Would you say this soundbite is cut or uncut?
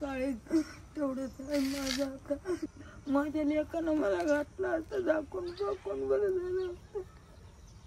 cut